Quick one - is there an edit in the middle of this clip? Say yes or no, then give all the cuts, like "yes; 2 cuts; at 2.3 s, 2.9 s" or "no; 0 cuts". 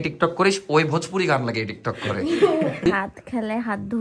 yes; 1 cut; at 2.9 s